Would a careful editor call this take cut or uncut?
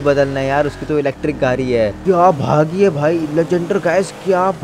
cut